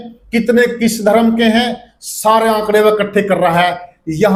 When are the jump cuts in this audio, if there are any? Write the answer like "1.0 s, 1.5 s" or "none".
none